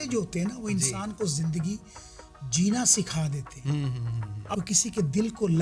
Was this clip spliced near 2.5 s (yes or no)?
no